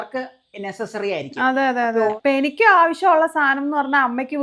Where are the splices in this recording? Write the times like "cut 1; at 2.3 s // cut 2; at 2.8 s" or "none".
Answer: cut 1; at 2.1 s